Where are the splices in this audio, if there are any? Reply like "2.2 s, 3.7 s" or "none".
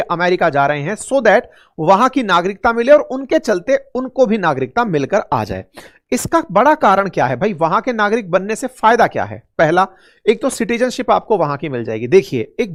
none